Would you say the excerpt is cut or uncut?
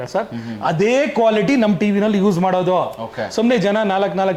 uncut